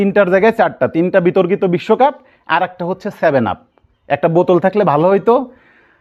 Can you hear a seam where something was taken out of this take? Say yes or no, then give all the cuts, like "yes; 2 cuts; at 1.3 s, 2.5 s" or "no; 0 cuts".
no; 0 cuts